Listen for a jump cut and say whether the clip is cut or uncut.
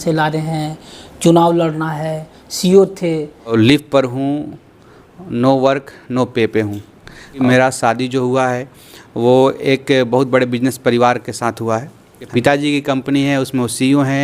cut